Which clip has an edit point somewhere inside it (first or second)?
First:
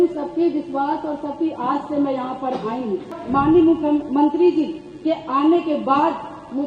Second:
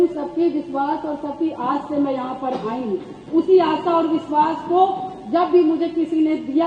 first